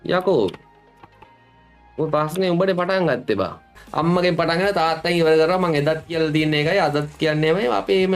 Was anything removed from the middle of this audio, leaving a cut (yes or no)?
yes